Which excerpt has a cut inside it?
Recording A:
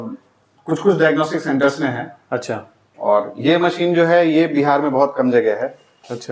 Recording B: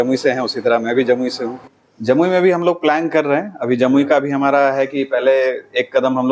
B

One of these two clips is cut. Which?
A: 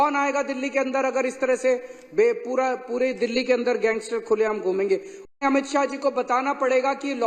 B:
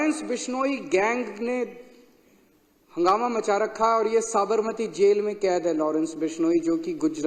A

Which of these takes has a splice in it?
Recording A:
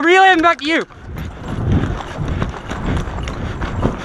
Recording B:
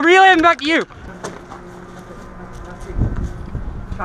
B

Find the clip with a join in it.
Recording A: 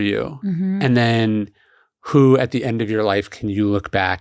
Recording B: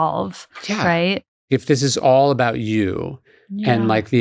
B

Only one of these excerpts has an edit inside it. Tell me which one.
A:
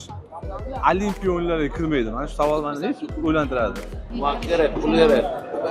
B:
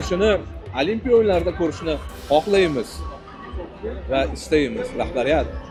A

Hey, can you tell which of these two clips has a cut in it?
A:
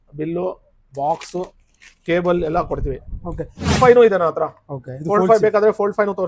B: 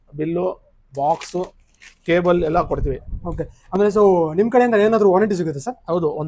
A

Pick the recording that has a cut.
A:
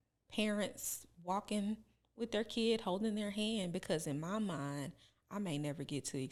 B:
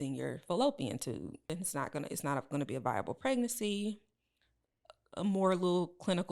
B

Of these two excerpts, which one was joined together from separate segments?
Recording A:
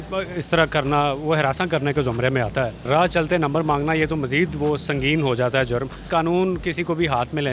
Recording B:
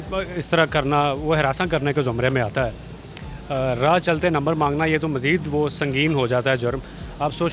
A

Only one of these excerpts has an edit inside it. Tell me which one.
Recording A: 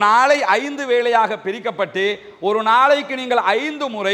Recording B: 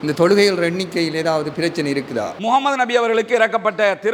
B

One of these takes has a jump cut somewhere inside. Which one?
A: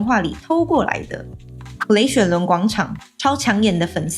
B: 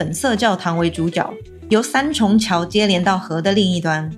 A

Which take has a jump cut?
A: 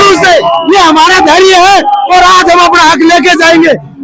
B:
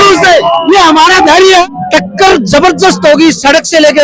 B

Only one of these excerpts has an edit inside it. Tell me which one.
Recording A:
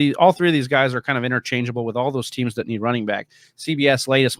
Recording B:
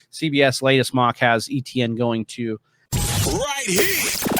B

